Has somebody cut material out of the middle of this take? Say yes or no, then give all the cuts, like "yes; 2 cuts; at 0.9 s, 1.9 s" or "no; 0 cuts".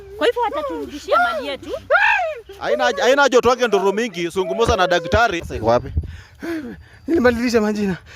yes; 1 cut; at 5.4 s